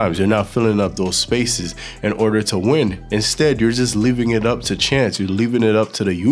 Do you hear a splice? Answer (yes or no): no